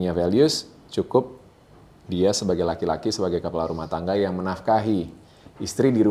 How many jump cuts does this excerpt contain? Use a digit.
0